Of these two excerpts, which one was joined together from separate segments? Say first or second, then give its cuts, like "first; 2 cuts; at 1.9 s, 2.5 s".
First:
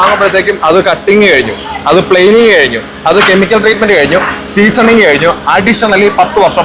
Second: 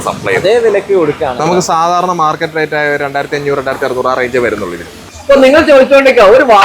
second; 2 cuts; at 1.4 s, 5.1 s